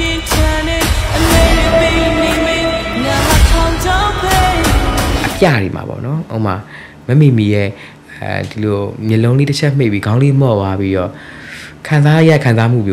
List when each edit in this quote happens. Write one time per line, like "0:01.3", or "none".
0:05.2